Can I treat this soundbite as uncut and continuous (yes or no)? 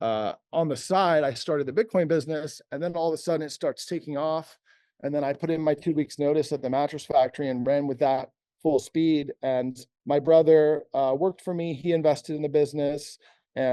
yes